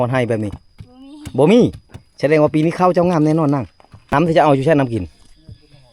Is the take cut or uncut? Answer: cut